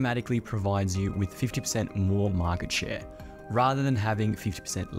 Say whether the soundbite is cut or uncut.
uncut